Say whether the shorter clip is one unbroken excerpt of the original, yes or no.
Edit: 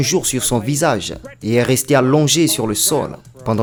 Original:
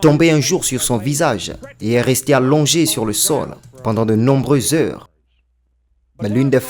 yes